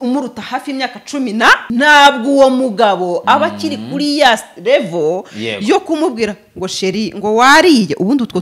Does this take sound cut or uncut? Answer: cut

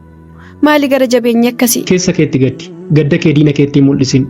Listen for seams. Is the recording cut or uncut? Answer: cut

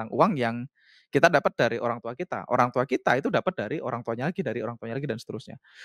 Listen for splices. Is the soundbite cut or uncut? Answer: uncut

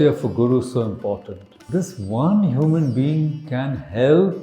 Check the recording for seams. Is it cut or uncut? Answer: cut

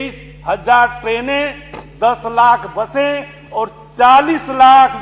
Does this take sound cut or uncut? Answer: uncut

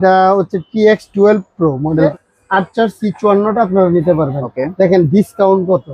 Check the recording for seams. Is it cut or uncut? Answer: cut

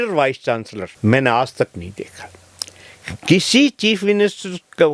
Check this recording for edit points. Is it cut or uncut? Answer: uncut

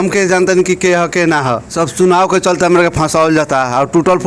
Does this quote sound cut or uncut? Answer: uncut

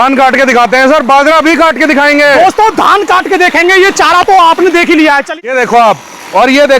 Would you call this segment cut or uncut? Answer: cut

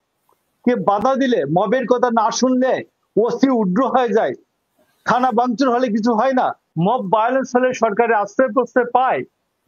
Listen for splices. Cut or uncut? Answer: cut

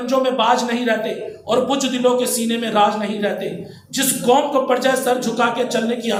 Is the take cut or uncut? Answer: uncut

